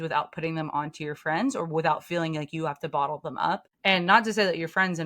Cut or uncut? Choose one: cut